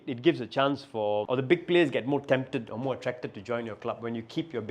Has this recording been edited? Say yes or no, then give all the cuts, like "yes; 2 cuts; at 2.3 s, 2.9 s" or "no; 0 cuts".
yes; 1 cut; at 1.3 s